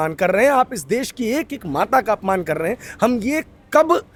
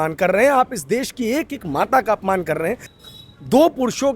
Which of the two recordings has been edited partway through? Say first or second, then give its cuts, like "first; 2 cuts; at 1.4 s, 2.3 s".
second; 1 cut; at 2.9 s